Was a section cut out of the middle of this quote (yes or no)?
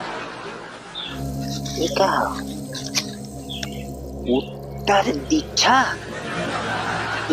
yes